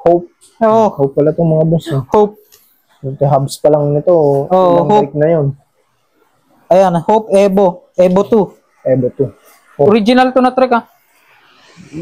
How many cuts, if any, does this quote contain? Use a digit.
1